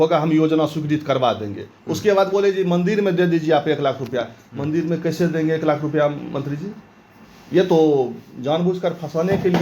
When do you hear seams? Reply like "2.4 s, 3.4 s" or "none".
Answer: none